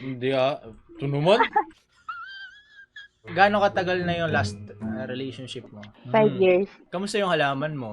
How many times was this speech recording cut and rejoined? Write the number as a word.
one